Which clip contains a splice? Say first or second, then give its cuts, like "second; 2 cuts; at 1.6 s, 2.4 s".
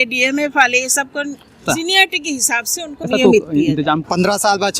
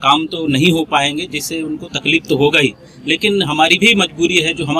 first; 3 cuts; at 1.6 s, 3.1 s, 4.1 s